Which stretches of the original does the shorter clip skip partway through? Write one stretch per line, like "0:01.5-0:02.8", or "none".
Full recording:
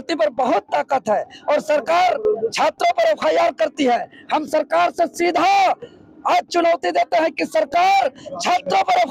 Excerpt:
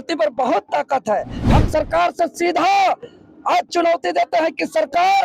0:01.3-0:04.1